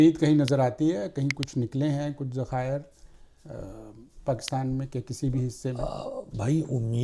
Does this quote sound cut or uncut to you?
uncut